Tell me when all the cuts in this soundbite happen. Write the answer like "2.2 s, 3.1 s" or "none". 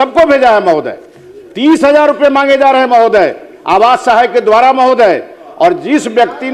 none